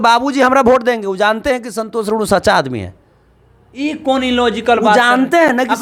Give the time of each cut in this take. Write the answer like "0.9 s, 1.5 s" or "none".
none